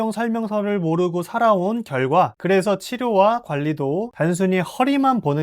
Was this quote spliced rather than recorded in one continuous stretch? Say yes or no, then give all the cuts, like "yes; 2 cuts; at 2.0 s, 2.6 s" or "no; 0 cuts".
yes; 1 cut; at 2.4 s